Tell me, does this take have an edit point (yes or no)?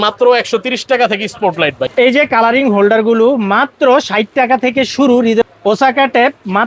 yes